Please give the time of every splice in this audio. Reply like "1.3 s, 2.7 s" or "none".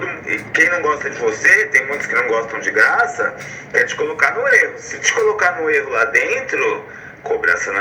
none